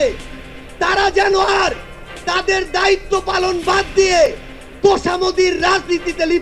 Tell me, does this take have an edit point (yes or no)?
no